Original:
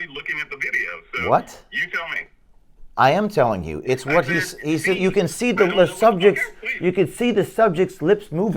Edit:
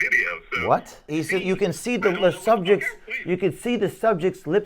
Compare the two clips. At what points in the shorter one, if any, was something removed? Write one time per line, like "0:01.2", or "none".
0:01.0